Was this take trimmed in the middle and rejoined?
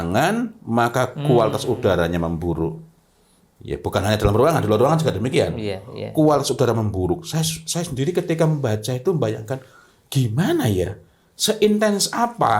no; 0 cuts

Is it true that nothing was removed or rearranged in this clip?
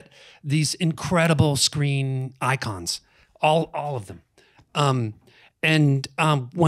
yes; 0 cuts

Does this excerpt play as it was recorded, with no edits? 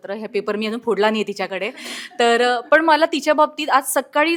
yes; 0 cuts

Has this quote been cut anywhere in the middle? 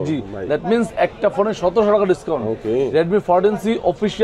no; 0 cuts

